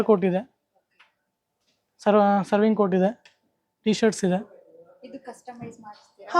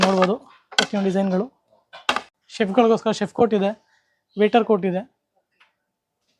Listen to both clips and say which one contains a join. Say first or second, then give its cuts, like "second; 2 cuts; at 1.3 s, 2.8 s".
second; 1 cut; at 2.2 s